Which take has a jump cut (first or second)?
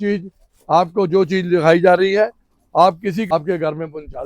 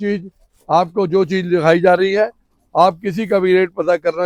first